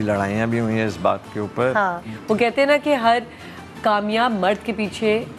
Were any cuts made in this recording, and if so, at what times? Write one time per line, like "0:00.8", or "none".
0:02.0